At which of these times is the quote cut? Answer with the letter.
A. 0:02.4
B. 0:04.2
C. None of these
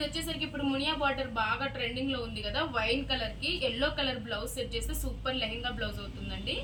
C